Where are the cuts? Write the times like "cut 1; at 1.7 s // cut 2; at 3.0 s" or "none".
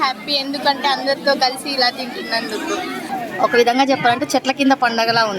cut 1; at 3.1 s